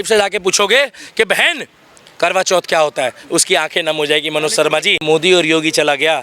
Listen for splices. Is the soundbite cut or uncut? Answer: cut